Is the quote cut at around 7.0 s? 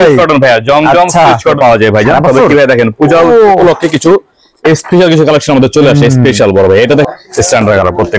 yes; 2 cuts; at 1.6 s, 7.0 s

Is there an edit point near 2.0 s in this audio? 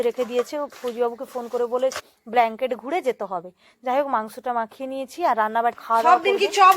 yes; 2 cuts; at 2.0 s, 5.8 s

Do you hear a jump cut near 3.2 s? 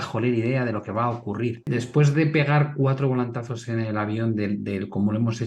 no; 1 cut; at 1.6 s

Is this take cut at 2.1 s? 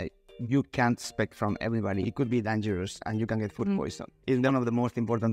yes; 2 cuts; at 2.1 s, 4.1 s

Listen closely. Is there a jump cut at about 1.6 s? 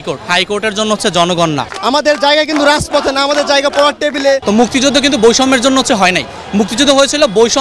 yes; 2 cuts; at 1.6 s, 4.4 s

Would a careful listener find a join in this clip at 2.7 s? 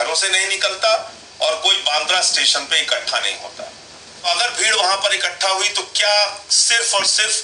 no; 1 cut; at 4.2 s

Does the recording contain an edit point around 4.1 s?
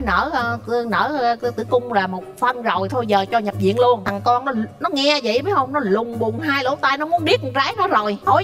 yes; 1 cut; at 4.1 s

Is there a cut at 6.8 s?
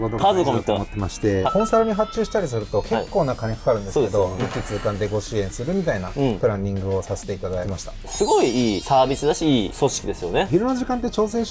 no; 4 cuts; at 1.5 s, 4.4 s, 8.1 s, 10.5 s

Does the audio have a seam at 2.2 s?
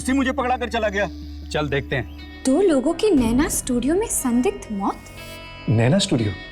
yes; 2 cuts; at 2.2 s, 5.6 s

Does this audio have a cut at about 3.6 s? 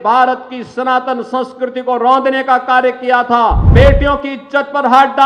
yes; 1 cut; at 3.6 s

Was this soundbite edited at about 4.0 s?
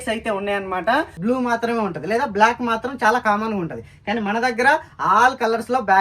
no; 1 cut; at 1.1 s

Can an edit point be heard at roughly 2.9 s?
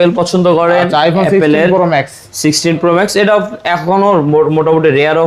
no; 0 cuts

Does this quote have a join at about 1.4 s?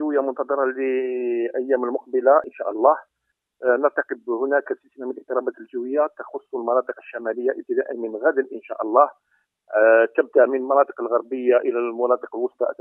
no; 1 cut; at 3.0 s

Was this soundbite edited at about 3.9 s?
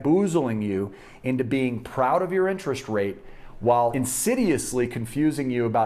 yes; 1 cut; at 3.9 s

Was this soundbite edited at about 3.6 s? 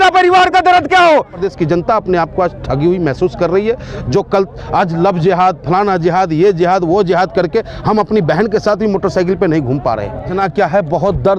no; 2 cuts; at 1.4 s, 10.3 s

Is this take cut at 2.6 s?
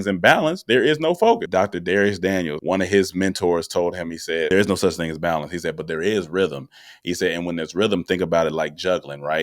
yes; 3 cuts; at 1.4 s, 2.6 s, 4.5 s

